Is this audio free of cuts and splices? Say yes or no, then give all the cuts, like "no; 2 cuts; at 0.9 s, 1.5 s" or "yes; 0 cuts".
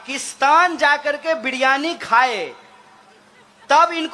yes; 0 cuts